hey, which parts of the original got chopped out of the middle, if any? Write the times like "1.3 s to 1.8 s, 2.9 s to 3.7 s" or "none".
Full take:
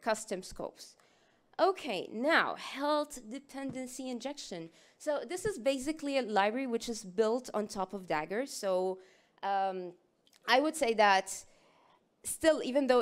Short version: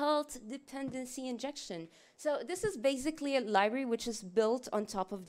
none